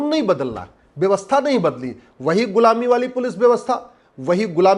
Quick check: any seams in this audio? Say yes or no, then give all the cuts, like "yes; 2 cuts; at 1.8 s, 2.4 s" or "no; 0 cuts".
no; 0 cuts